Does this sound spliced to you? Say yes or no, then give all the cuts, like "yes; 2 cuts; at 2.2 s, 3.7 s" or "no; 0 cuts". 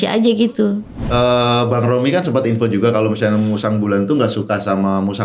yes; 1 cut; at 1.0 s